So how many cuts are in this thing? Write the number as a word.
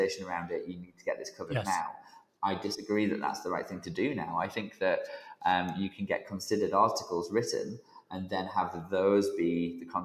zero